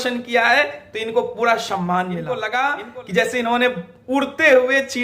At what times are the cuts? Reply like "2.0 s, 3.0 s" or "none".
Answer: 2.3 s